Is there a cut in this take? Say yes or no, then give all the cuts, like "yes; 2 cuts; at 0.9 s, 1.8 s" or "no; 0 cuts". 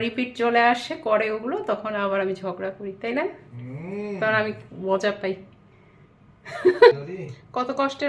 yes; 1 cut; at 7.0 s